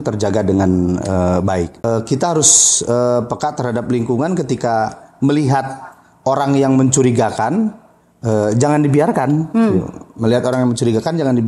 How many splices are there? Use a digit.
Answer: 1